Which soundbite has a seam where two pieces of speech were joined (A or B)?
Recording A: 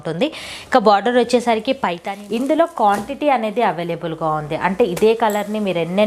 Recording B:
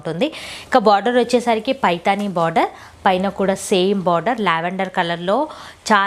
A